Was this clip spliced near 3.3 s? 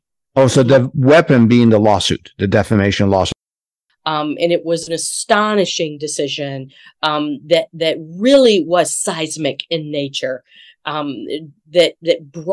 yes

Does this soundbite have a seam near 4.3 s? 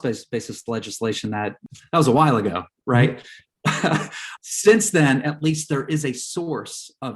yes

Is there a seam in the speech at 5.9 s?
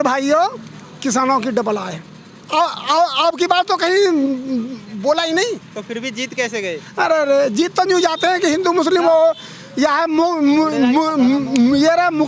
no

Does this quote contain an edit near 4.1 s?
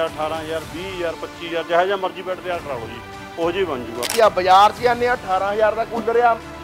yes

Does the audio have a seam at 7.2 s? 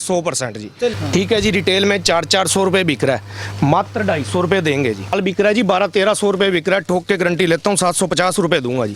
no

